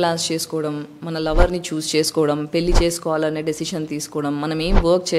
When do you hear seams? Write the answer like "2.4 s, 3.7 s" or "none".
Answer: none